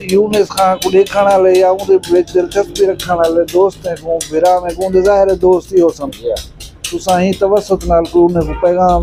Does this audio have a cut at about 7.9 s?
no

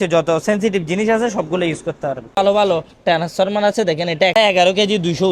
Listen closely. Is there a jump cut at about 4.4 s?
yes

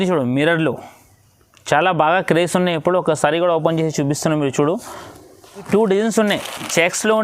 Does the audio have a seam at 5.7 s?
yes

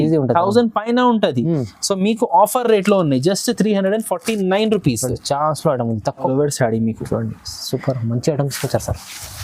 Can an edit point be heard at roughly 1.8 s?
no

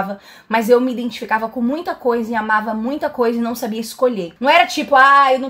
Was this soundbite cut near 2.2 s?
no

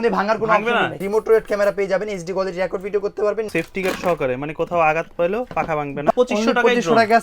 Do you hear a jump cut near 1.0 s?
yes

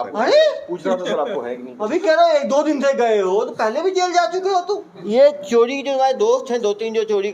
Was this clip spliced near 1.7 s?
no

